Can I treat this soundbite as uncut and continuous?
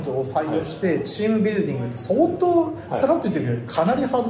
yes; 0 cuts

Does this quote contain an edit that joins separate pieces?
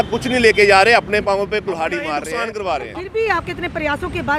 yes; 1 cut; at 2.2 s

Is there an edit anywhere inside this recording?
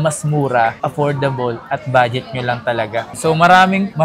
yes; 1 cut; at 3.1 s

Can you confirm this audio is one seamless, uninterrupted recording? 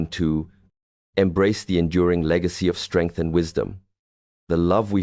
no; 1 cut; at 1.4 s

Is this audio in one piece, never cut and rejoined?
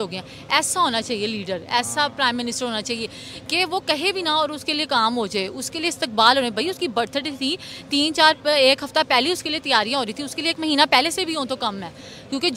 yes; 0 cuts

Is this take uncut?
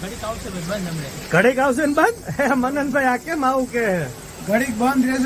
yes; 0 cuts

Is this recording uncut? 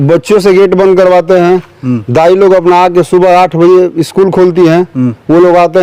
yes; 0 cuts

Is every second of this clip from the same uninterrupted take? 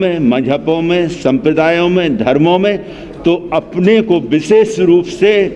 yes; 0 cuts

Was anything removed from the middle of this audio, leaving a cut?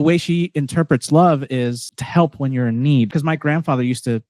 yes; 2 cuts; at 1.9 s, 3.1 s

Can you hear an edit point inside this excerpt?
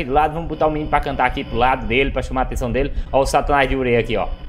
no; 0 cuts

